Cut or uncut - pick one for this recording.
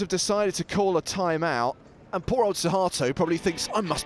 uncut